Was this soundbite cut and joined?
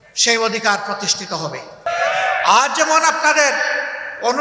yes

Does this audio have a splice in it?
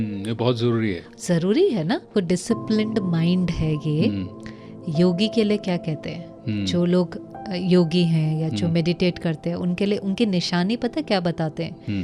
yes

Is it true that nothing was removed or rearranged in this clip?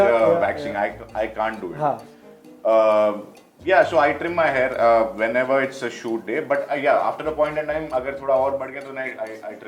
yes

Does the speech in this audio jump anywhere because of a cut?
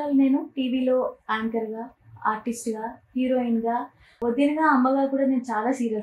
no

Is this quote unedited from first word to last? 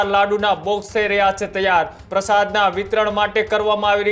no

